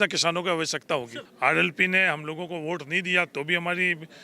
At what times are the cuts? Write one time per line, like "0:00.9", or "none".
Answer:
0:01.2